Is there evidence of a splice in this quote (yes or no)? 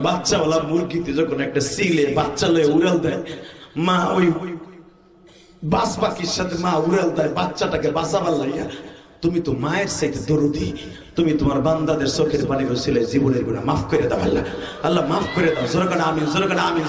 no